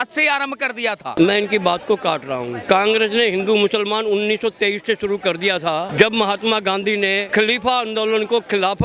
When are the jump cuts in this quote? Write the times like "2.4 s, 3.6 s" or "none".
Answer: 1.1 s, 2.6 s, 5.9 s, 7.2 s